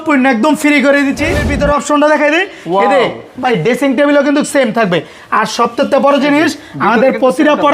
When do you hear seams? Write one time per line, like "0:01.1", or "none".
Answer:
0:01.4

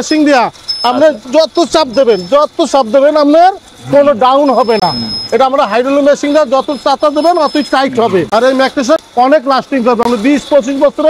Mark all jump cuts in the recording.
none

